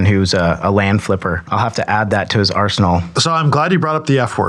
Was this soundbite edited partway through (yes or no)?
yes